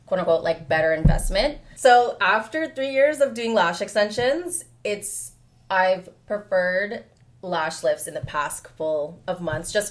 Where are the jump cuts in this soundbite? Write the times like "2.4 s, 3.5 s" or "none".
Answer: 1.7 s